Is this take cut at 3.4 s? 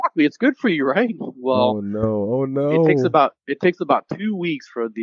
no; 0 cuts

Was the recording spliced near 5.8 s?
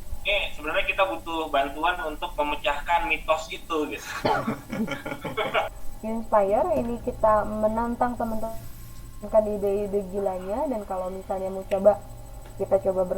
yes; 1 cut; at 5.8 s

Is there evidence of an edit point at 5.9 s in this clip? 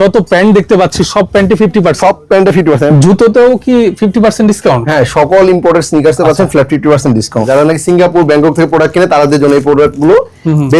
no; 2 cuts; at 2.9 s, 7.4 s

